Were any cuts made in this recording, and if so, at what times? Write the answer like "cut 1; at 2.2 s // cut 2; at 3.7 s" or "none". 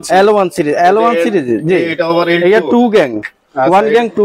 none